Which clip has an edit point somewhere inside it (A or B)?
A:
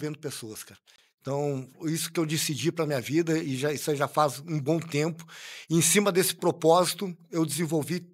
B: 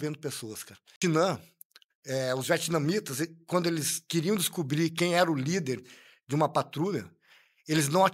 B